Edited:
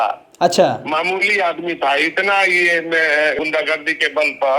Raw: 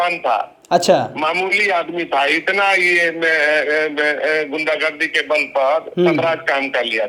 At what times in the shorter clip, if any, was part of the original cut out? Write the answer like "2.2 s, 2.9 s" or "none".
3.4 s